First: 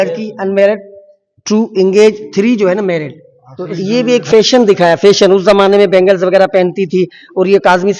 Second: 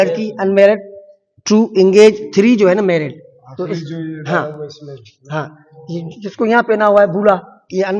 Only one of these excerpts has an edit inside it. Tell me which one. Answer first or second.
first